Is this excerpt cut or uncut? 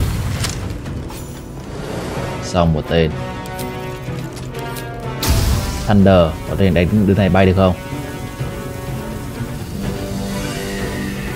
uncut